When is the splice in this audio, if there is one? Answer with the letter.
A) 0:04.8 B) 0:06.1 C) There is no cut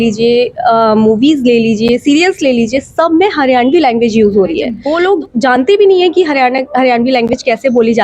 A